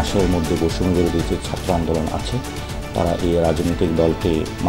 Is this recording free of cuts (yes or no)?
yes